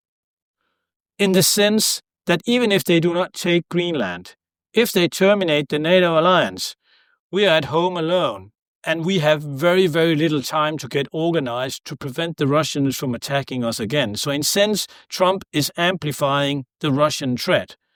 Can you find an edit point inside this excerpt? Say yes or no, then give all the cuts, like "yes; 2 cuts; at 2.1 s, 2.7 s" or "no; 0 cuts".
no; 0 cuts